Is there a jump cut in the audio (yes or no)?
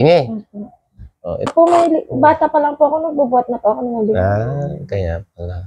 yes